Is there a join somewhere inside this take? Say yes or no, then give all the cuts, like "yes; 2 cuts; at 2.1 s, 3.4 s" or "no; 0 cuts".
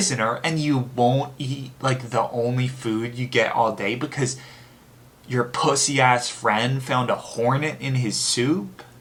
no; 0 cuts